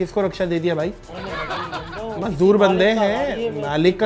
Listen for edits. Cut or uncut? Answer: uncut